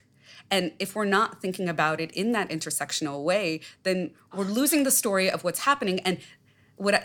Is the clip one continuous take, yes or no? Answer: no